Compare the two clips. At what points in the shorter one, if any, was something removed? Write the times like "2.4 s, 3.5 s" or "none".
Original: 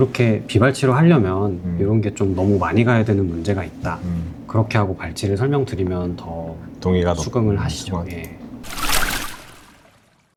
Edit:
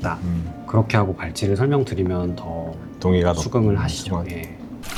none